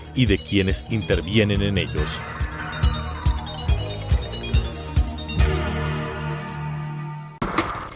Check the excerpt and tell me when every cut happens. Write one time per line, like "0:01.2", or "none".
none